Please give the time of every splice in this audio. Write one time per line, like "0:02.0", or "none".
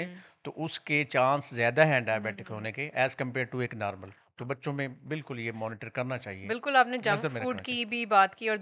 none